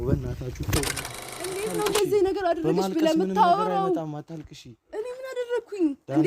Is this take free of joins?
no; 1 cut; at 1.6 s

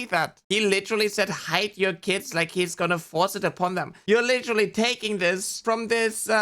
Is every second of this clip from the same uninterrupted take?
no; 2 cuts; at 3.9 s, 5.5 s

